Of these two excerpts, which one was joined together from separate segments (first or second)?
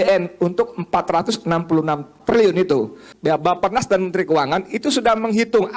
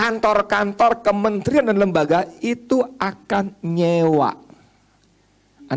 first